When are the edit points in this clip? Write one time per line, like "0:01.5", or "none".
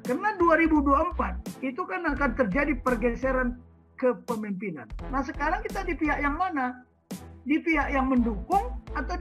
0:05.0